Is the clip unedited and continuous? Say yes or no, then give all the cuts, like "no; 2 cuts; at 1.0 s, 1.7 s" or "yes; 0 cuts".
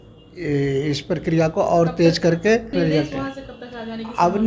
no; 1 cut; at 2.7 s